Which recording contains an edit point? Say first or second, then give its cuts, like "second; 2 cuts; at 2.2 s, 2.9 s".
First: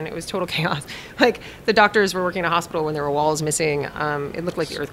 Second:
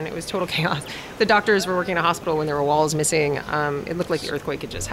second; 1 cut; at 1.0 s